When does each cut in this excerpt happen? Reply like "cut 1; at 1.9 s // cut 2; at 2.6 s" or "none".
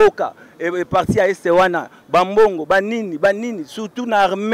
none

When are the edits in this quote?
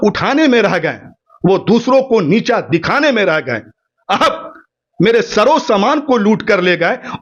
none

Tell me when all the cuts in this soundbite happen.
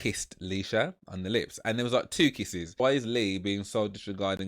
cut 1; at 2.7 s

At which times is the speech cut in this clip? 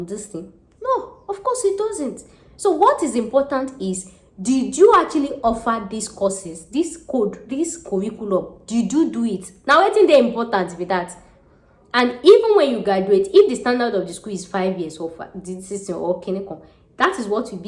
none

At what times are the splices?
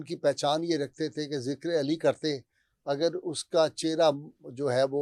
none

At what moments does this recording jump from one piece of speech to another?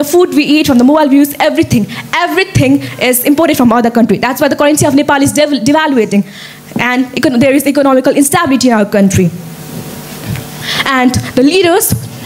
none

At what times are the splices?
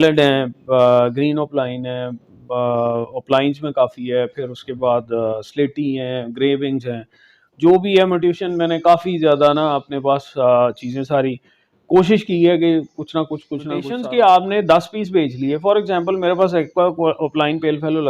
cut 1; at 13.9 s

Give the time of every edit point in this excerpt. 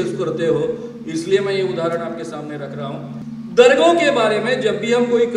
cut 1; at 3.2 s

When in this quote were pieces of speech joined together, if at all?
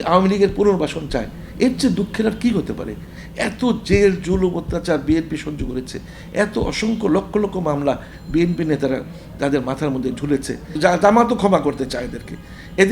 cut 1; at 10.6 s

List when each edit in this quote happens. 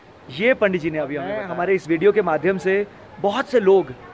cut 1; at 1.8 s

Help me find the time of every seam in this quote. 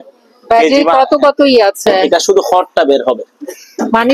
cut 1; at 2.0 s

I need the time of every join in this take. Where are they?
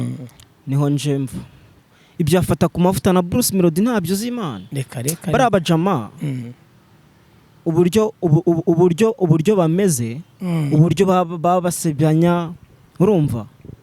cut 1; at 1.9 s

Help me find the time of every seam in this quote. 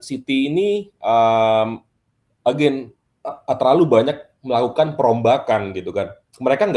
none

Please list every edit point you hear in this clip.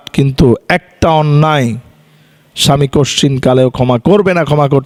none

